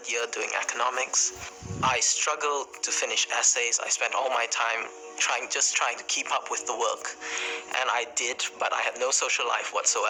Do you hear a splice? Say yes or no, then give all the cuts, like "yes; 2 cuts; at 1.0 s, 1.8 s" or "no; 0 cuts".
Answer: no; 0 cuts